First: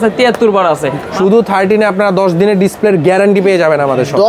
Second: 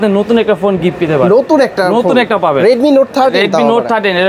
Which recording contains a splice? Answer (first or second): first